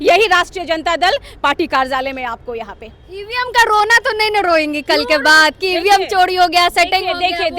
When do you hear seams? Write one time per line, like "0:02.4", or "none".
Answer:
none

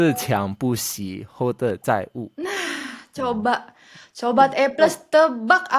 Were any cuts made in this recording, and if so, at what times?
none

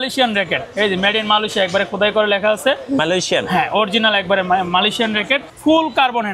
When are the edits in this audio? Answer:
0:05.4

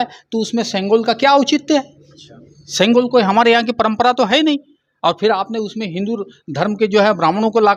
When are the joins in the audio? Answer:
none

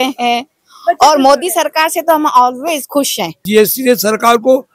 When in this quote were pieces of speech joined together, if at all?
0:03.4

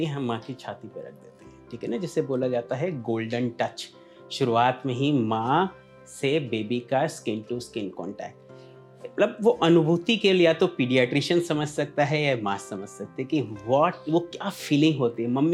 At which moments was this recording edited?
none

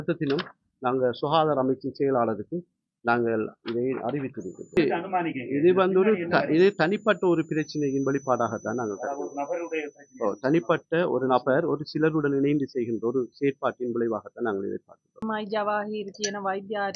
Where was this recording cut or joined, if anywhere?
0:04.8
0:15.2

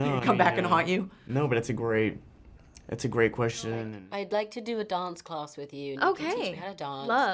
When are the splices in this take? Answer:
0:03.9

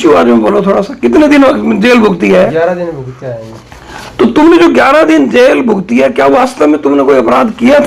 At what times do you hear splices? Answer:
none

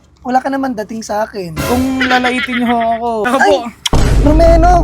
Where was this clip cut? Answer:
0:03.2

